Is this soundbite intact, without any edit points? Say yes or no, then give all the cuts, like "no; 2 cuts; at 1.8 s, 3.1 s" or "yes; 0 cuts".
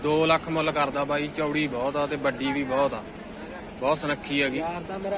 yes; 0 cuts